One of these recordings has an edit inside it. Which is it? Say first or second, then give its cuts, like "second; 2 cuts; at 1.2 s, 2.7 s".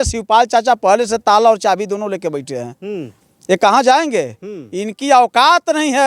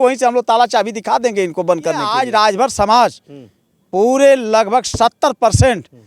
second; 1 cut; at 2.1 s